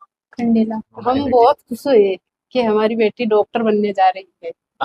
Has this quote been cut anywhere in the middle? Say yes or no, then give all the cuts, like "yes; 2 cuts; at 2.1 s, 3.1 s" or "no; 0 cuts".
yes; 1 cut; at 0.9 s